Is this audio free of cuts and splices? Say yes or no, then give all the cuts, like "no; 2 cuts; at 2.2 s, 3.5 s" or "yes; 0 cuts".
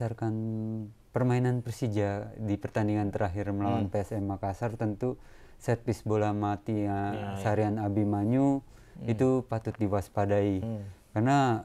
yes; 0 cuts